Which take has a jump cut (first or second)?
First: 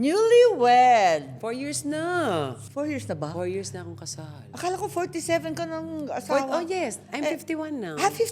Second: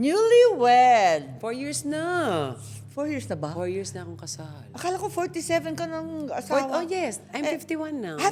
first